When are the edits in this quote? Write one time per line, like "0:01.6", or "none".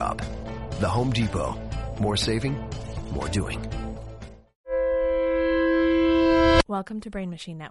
0:04.7
0:06.6